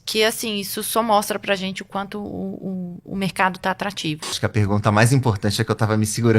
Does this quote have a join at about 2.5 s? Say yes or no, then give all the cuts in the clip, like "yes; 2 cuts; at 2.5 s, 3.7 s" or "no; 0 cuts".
no; 1 cut; at 4.4 s